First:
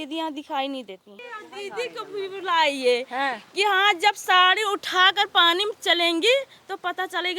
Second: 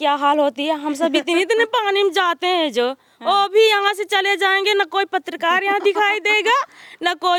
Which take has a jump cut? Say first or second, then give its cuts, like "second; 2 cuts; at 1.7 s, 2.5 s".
first; 1 cut; at 1.3 s